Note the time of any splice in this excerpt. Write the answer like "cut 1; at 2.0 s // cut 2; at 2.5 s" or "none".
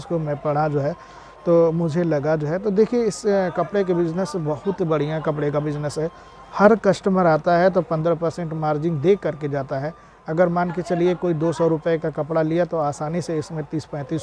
none